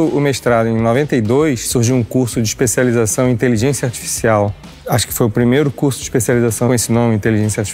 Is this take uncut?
no; 1 cut; at 6.7 s

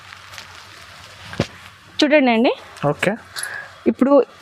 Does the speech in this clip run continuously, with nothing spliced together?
yes; 0 cuts

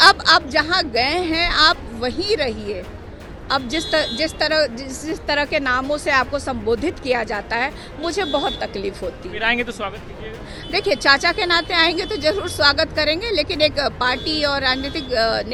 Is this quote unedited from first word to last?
yes; 0 cuts

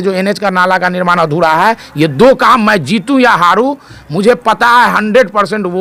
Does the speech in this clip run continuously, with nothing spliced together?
yes; 0 cuts

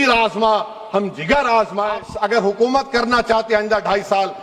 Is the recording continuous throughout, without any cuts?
no; 1 cut; at 2.0 s

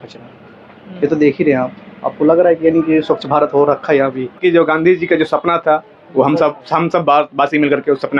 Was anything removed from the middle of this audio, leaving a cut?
yes; 1 cut; at 4.4 s

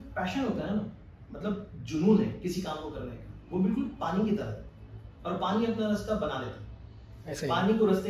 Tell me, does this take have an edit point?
no; 0 cuts

